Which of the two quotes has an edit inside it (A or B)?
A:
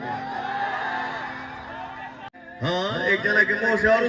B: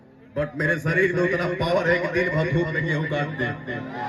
A